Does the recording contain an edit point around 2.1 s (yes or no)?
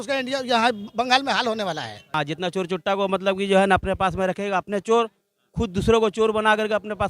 yes